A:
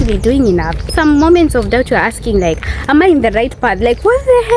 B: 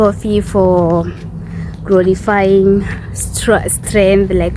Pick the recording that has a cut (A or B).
A